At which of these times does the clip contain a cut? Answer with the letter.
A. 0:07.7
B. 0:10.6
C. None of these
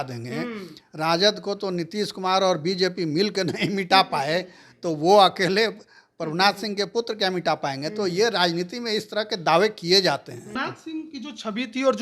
B